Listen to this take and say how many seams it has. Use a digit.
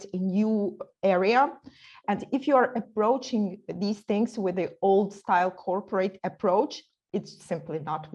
0